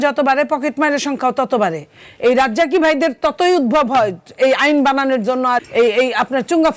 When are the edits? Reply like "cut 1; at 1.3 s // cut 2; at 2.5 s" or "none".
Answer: cut 1; at 5.6 s